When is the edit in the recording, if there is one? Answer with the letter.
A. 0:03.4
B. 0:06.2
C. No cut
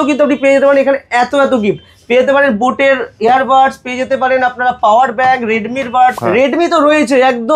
B